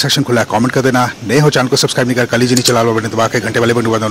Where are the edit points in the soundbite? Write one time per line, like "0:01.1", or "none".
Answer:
none

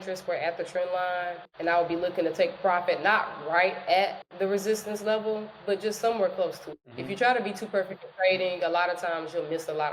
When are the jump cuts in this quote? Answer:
none

